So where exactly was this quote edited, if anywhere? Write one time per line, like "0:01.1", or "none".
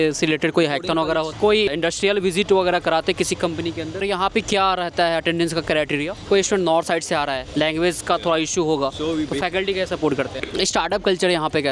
0:01.3
0:04.0
0:06.2
0:07.4
0:10.4